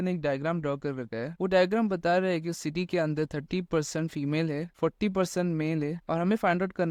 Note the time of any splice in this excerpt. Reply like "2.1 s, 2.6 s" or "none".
none